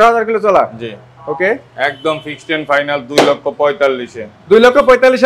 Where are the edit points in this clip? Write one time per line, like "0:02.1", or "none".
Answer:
none